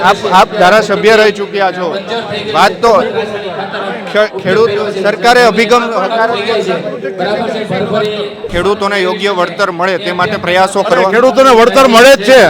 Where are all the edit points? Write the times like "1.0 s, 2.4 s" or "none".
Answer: 8.5 s